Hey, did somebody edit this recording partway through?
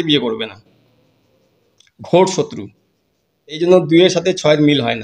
yes; 1 cut; at 3.6 s

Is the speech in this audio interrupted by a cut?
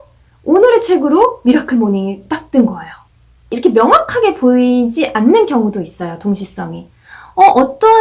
yes; 1 cut; at 3.5 s

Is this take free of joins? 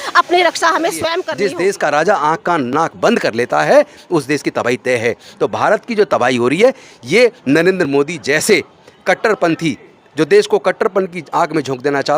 no; 1 cut; at 1.2 s

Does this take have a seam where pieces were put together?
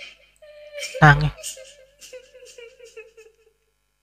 yes; 2 cuts; at 1.3 s, 3.0 s

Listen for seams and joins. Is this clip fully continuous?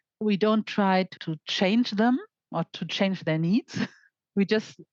yes; 0 cuts

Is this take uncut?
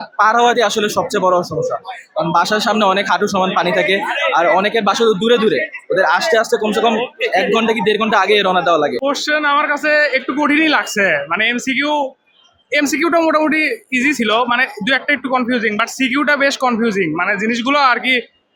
yes; 0 cuts

